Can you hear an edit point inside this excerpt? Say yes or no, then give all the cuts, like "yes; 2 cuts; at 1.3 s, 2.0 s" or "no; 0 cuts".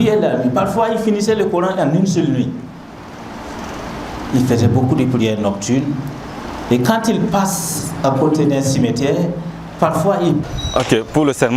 yes; 1 cut; at 10.5 s